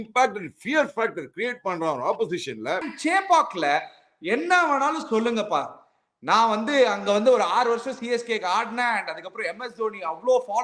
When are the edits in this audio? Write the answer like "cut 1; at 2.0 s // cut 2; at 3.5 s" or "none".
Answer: cut 1; at 2.9 s